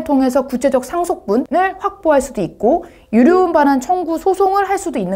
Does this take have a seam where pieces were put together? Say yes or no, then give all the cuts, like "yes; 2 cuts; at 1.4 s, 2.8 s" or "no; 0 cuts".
no; 0 cuts